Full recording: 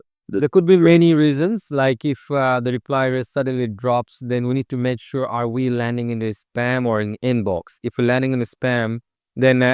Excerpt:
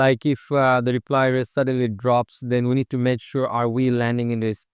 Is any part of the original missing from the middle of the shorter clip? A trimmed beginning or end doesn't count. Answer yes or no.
no